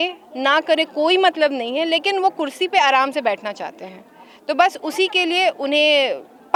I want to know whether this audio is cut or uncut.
uncut